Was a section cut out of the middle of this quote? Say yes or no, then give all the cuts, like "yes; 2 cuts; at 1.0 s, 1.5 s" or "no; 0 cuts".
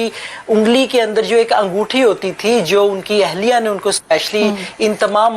no; 0 cuts